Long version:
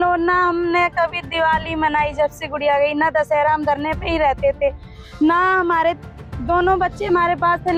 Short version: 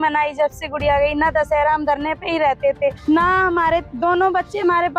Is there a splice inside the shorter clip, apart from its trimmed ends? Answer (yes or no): yes